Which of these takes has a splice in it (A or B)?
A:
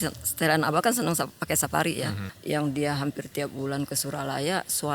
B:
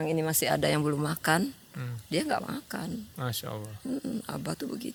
A